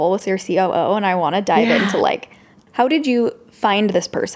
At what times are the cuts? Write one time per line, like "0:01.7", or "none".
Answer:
0:02.6

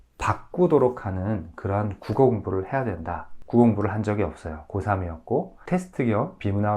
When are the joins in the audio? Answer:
0:03.3
0:05.6

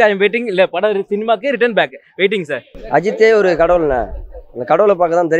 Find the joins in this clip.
0:02.7

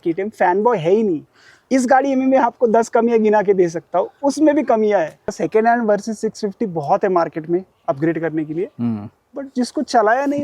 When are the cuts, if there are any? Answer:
0:05.4

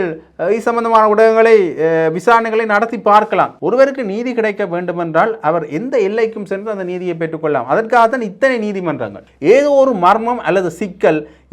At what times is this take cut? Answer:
0:03.6
0:09.2

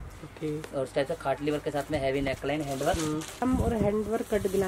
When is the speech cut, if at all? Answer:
0:03.4

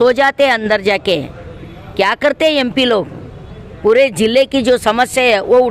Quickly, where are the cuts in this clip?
none

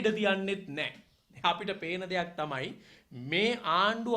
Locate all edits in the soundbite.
none

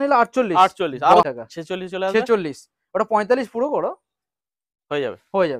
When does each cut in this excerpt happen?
0:01.3

